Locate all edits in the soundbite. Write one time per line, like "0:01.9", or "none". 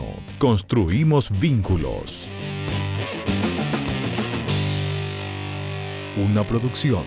none